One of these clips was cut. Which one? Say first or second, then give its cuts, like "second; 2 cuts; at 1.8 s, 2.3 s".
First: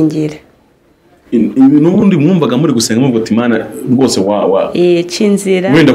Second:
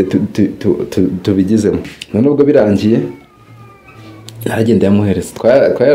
second; 1 cut; at 1.9 s